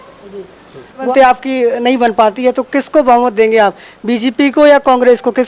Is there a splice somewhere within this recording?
yes; 1 cut; at 1.0 s

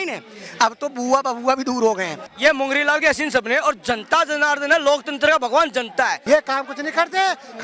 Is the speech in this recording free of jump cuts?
no; 2 cuts; at 2.3 s, 6.2 s

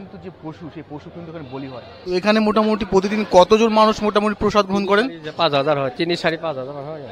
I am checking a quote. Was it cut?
yes; 1 cut; at 1.9 s

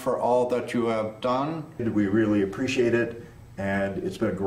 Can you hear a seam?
yes; 1 cut; at 1.8 s

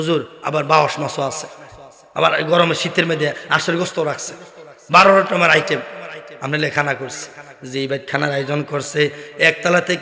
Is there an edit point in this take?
no; 0 cuts

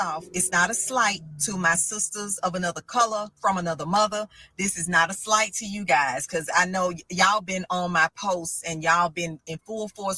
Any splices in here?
no; 0 cuts

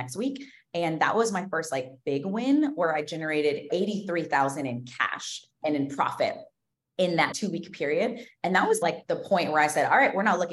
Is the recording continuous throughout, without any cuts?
no; 4 cuts; at 3.7 s, 5.5 s, 7.3 s, 8.8 s

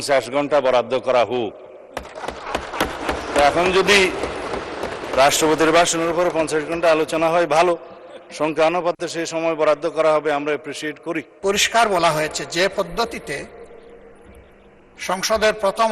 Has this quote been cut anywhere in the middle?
yes; 1 cut; at 11.3 s

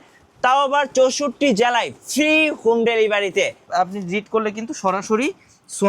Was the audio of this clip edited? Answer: yes; 1 cut; at 3.7 s

